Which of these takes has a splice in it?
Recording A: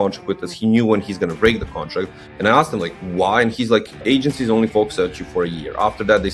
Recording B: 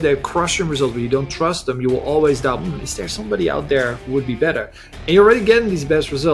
A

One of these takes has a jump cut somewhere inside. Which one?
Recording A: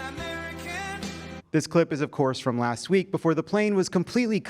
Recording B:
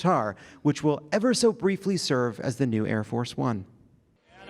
A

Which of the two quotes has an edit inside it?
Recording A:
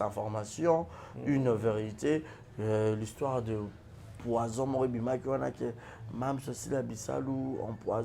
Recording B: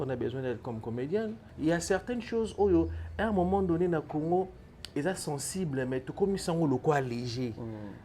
B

